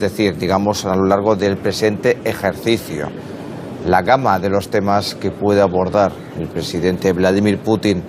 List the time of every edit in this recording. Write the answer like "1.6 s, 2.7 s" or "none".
7.0 s